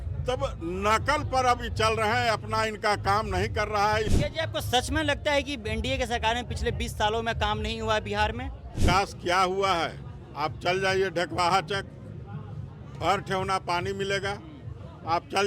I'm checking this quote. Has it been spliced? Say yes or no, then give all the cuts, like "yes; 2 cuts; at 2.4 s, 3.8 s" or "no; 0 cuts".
yes; 2 cuts; at 4.1 s, 8.8 s